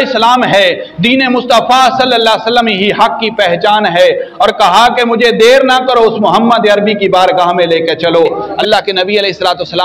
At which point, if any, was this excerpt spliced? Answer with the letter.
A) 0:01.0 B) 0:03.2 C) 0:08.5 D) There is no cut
C